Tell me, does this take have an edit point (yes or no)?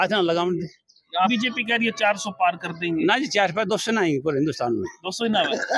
yes